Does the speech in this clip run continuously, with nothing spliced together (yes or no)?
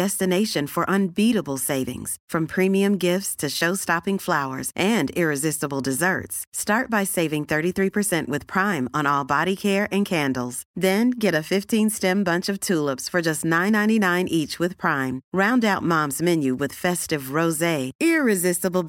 yes